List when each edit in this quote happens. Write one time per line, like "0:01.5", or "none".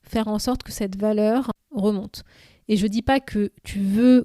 0:01.6